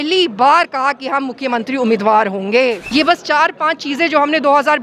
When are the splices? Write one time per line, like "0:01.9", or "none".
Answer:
0:02.8